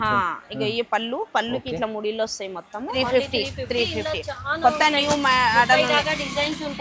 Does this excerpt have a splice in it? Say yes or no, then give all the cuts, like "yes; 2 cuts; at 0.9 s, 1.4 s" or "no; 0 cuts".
yes; 1 cut; at 3.0 s